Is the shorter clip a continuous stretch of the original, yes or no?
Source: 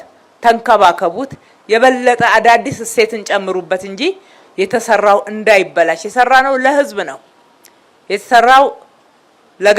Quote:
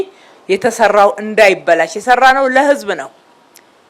yes